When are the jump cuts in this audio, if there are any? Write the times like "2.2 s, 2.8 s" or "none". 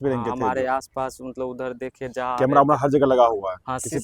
none